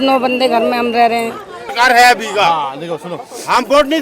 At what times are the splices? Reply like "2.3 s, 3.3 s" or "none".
1.7 s